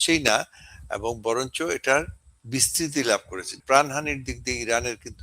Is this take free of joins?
no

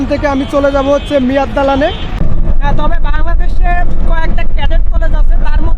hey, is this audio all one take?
no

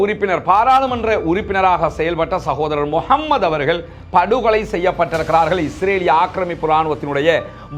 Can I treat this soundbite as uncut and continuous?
yes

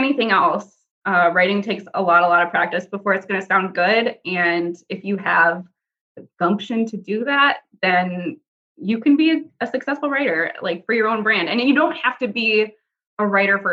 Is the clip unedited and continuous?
yes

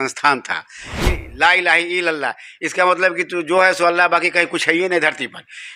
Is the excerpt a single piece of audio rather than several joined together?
no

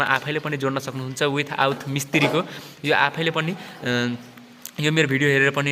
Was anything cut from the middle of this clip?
no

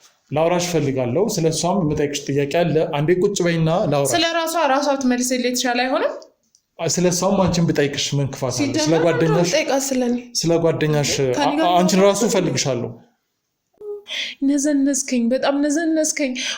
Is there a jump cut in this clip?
yes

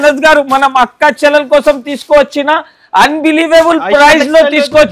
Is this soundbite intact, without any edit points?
yes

